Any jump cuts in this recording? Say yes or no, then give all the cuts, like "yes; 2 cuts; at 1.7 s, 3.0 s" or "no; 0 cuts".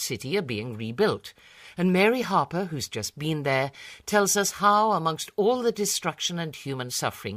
yes; 1 cut; at 2.9 s